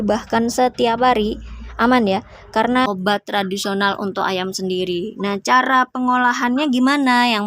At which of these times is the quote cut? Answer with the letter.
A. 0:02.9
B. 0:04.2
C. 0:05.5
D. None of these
A